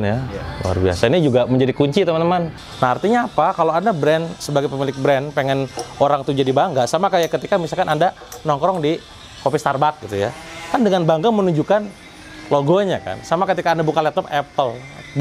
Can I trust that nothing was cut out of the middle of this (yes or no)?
no